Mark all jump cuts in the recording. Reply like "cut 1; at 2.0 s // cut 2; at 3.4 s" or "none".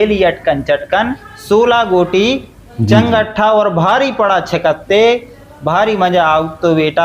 cut 1; at 1.2 s

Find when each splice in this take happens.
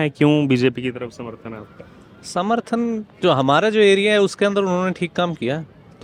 none

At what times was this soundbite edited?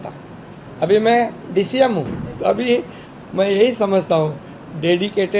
cut 1; at 2.2 s

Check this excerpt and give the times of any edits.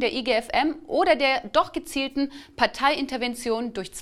cut 1; at 2.5 s

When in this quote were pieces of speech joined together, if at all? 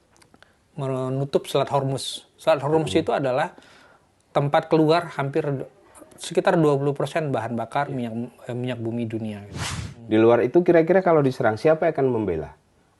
cut 1; at 9.7 s

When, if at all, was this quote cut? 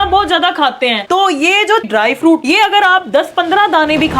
cut 1; at 1.1 s // cut 2; at 2.4 s

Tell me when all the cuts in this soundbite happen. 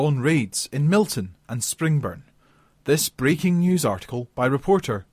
none

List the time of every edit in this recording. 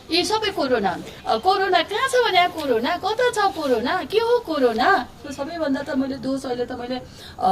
cut 1; at 1.1 s // cut 2; at 5.4 s

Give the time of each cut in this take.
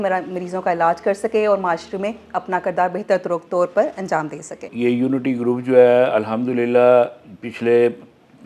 cut 1; at 4.7 s

